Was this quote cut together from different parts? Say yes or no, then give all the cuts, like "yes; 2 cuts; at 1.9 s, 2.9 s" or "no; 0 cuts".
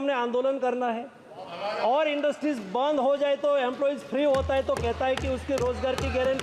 no; 0 cuts